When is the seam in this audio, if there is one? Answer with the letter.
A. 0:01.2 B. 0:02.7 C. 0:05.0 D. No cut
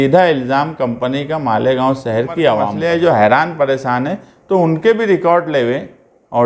B